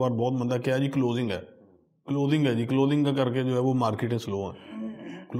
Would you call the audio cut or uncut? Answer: uncut